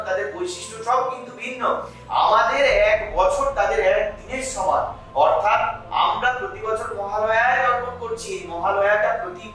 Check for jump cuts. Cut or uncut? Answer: cut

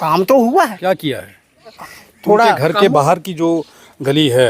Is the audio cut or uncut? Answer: cut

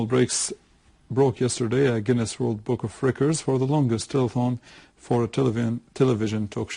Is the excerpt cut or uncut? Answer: cut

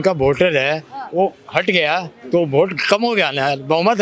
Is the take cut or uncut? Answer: uncut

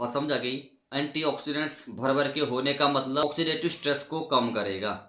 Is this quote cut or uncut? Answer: cut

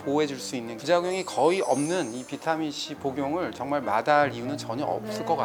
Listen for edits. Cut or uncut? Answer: uncut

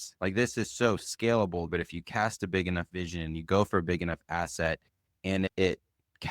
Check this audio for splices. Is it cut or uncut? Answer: cut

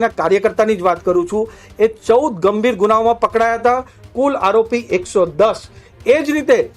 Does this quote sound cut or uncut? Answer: uncut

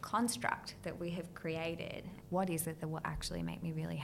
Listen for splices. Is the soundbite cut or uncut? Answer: cut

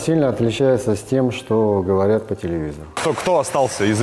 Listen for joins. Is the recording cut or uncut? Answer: cut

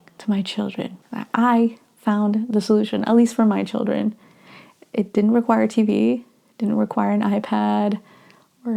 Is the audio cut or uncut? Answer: uncut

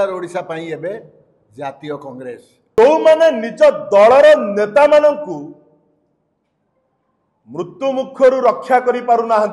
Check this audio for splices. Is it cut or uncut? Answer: cut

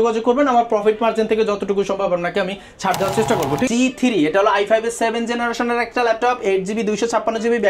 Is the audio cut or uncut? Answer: cut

